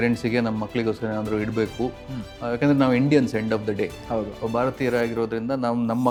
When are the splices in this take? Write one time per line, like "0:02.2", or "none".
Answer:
none